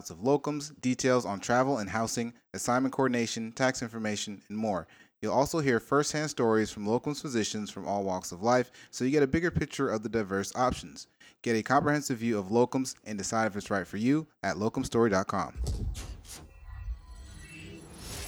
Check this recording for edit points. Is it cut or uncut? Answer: cut